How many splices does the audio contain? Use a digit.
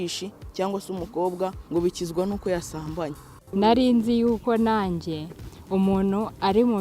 2